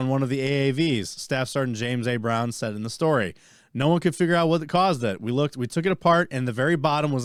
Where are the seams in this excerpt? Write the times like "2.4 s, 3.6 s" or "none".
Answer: none